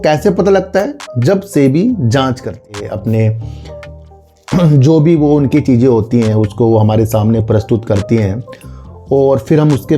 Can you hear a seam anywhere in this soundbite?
yes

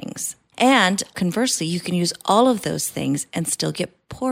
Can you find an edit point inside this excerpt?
yes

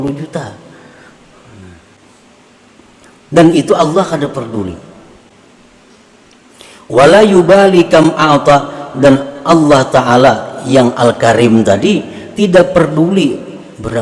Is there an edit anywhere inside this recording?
no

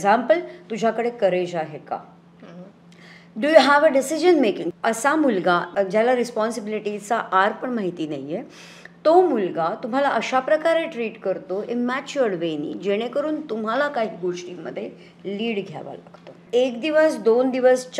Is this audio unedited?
no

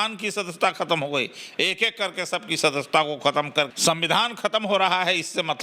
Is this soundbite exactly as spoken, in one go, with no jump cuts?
no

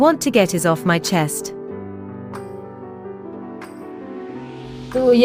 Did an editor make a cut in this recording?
no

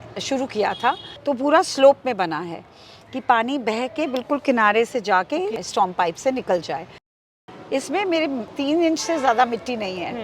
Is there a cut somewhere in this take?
yes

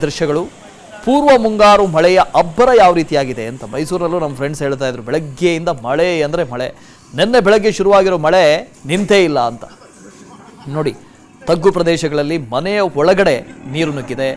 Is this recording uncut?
yes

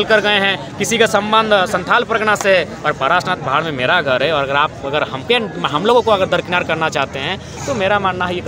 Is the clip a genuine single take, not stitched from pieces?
yes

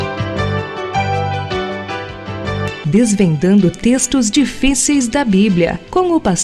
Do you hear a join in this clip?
no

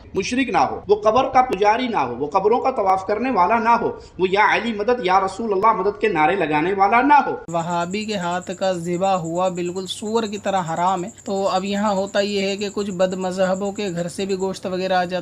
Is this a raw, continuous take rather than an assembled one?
no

